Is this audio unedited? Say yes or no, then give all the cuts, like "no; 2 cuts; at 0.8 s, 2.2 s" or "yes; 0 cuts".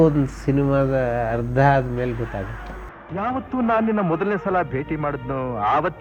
yes; 0 cuts